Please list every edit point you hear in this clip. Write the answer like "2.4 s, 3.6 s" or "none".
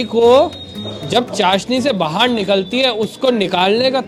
none